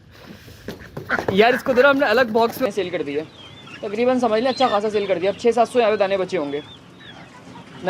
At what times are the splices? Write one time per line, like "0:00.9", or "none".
0:02.6